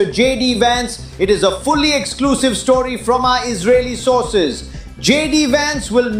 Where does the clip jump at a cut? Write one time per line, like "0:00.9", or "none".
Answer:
none